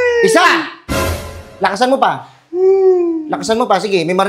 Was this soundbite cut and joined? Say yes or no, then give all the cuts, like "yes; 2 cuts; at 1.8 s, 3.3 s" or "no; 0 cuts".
no; 0 cuts